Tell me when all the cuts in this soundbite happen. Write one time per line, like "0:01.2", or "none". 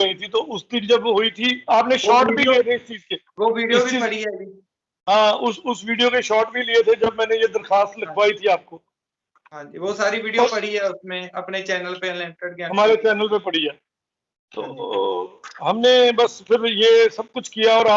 none